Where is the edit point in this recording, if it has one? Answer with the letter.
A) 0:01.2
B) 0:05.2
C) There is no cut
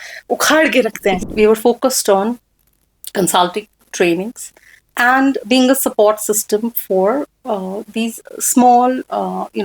A